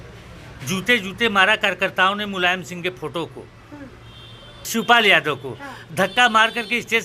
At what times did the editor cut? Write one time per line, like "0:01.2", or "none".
0:04.7